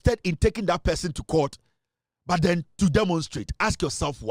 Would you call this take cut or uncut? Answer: uncut